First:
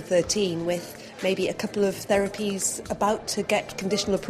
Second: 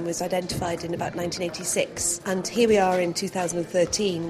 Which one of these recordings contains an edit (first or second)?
second